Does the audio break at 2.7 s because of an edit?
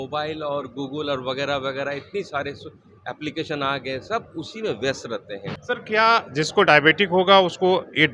no; 1 cut; at 5.6 s

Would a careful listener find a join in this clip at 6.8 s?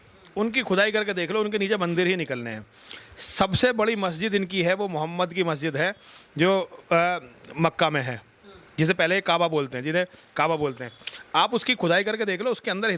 no; 0 cuts

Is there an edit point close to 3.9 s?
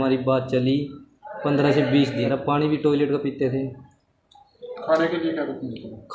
no; 1 cut; at 2.3 s

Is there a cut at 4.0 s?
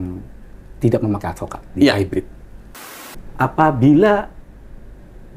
no; 1 cut; at 2.7 s

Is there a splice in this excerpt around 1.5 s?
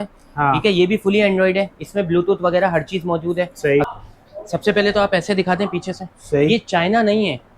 no; 1 cut; at 3.9 s

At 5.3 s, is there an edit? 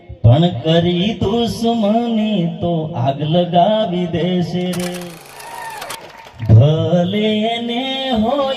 yes; 1 cut; at 5.3 s

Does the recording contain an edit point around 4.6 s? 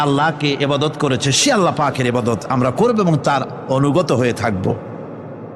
no; 0 cuts

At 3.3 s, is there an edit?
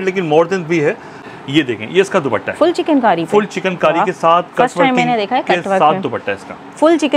no; 1 cut; at 1.1 s

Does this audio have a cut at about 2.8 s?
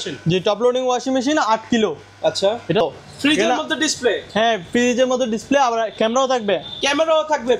yes; 1 cut; at 2.8 s

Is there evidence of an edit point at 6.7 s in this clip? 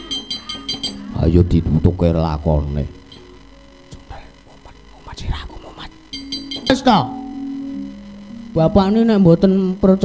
yes; 1 cut; at 6.7 s

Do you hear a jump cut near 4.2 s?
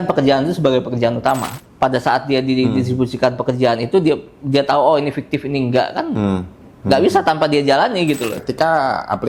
no; 2 cuts; at 1.6 s, 8.4 s

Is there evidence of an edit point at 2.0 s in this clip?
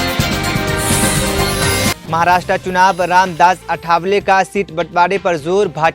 yes; 1 cut; at 2.0 s

